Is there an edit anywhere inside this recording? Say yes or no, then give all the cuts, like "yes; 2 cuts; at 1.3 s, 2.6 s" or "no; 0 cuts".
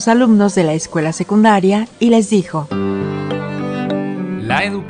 no; 0 cuts